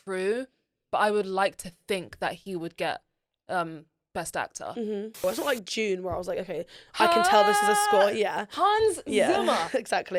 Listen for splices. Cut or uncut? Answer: cut